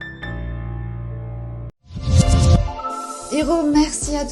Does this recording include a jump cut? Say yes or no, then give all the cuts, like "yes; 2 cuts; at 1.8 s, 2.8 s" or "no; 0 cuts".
yes; 1 cut; at 1.7 s